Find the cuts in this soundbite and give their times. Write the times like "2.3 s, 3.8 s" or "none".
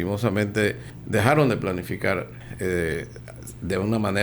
0.9 s, 2.4 s